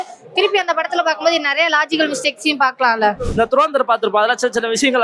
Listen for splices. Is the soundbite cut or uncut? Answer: cut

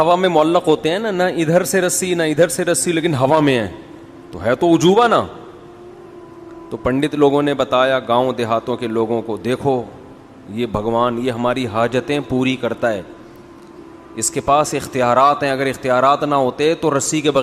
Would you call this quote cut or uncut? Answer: uncut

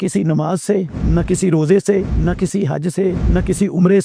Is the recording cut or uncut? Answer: cut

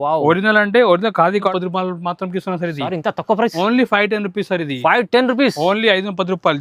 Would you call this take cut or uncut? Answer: cut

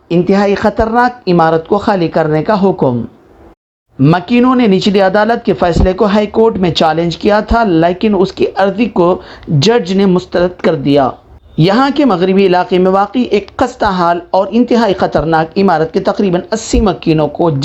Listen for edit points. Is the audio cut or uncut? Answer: uncut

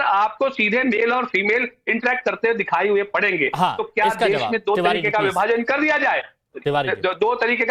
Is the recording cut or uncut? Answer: uncut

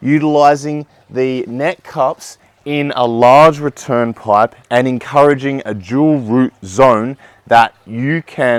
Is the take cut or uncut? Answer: uncut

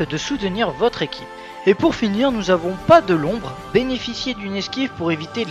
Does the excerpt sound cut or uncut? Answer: uncut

